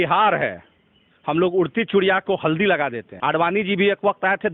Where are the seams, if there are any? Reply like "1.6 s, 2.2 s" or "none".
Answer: 3.1 s